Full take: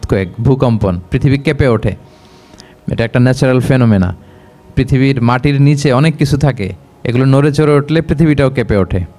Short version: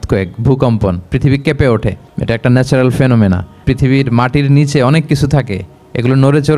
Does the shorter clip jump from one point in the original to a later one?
yes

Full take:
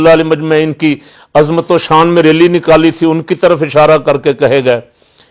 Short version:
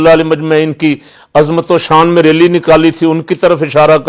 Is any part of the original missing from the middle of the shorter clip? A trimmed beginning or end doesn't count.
no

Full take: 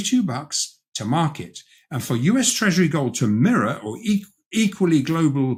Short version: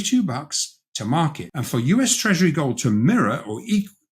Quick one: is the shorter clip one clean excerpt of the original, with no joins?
no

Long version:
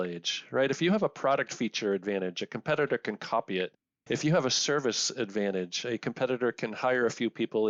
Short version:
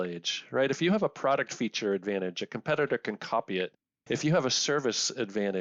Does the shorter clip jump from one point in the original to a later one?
no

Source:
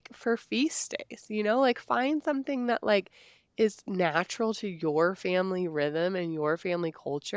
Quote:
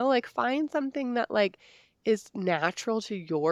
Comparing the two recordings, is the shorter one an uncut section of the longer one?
yes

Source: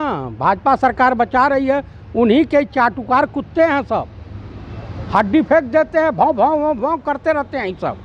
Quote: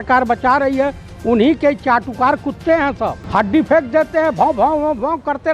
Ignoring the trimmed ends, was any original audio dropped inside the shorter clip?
yes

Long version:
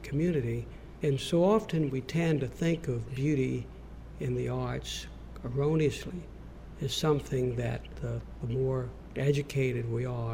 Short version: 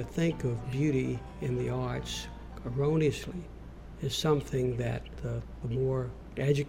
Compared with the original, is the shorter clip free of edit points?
no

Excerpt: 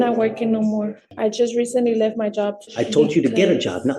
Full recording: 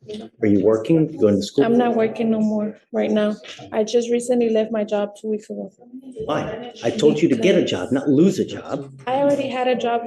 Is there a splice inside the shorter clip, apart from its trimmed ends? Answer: yes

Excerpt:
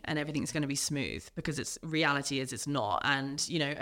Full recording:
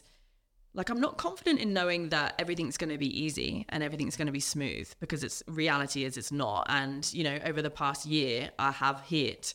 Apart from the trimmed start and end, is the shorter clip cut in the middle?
no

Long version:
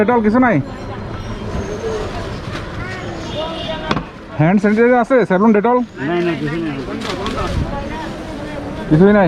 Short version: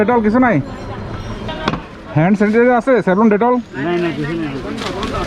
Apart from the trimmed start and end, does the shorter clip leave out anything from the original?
yes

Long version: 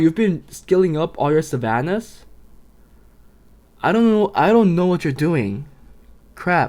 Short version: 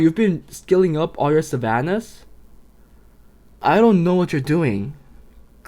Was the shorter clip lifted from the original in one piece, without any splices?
no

